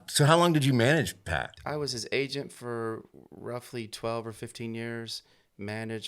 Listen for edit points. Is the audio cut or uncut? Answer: cut